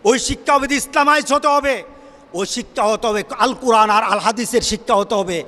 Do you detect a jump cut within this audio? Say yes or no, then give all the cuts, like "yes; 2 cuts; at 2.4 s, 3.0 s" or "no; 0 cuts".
no; 0 cuts